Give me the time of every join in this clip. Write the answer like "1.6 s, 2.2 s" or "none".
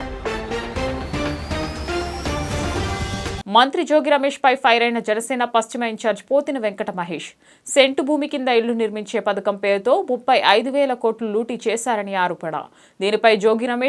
none